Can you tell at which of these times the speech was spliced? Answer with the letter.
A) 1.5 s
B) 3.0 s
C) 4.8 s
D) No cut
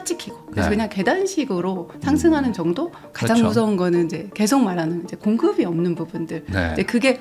B